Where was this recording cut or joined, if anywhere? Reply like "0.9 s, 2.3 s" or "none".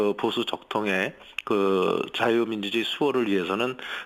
3.1 s